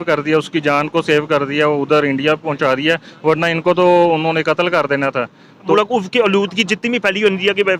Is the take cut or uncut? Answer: cut